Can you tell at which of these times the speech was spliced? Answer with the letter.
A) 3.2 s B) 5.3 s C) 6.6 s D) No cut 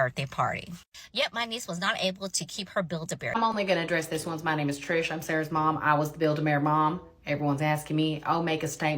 A